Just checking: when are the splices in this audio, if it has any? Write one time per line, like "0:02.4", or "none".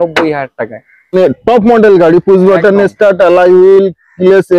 0:01.1